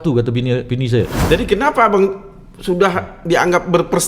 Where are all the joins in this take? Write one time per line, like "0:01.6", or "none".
0:01.2